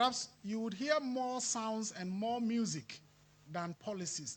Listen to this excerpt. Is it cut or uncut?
uncut